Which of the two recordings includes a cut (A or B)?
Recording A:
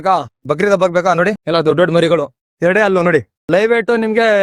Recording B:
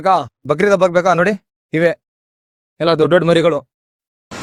A